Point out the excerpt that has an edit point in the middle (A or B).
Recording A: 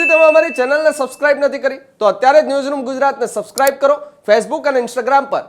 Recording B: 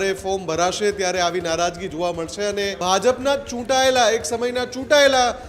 B